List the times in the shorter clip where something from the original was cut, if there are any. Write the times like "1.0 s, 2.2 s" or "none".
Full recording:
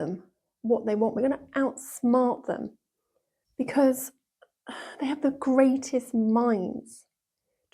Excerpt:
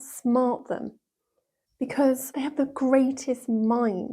2.3 s